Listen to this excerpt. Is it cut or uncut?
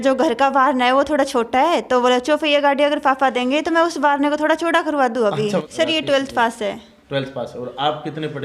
cut